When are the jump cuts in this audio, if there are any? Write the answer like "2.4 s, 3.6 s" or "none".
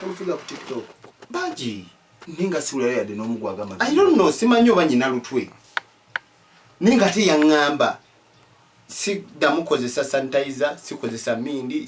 none

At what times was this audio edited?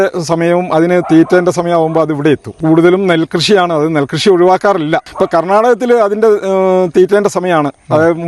2.6 s, 5.1 s

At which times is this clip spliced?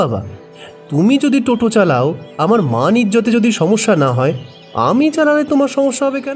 none

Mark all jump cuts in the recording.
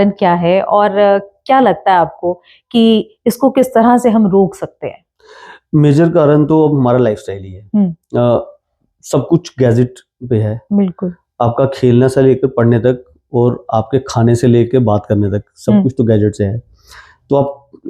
none

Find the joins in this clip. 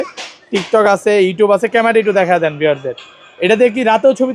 none

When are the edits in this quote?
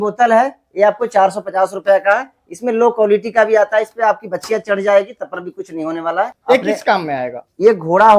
6.4 s

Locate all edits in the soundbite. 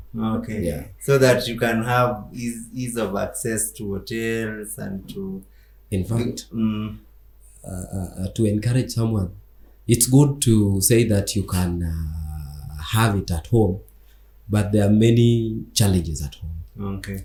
none

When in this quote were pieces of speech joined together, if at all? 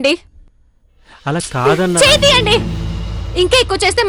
none

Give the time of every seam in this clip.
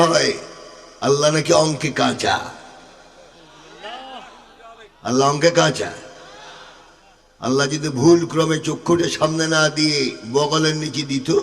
none

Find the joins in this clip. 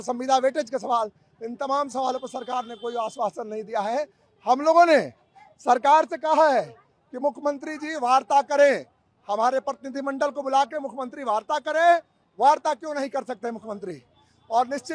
none

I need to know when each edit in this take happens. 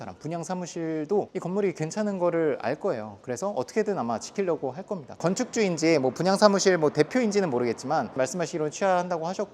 5.2 s, 8.1 s

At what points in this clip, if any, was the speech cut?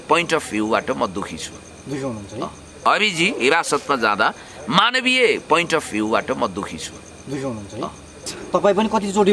none

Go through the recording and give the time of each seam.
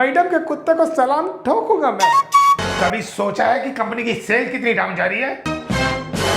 2.6 s, 5.5 s

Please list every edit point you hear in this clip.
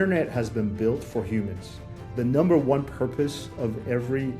1.9 s

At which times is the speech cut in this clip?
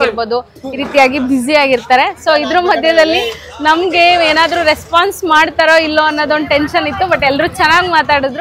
none

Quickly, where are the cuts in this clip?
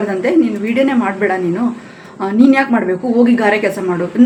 none

